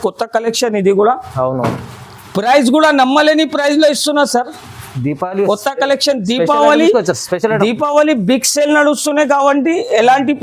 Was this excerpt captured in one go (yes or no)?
yes